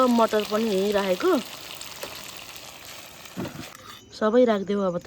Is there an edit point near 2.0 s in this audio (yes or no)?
no